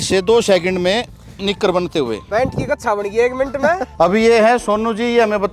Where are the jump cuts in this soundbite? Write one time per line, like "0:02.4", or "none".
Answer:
0:03.9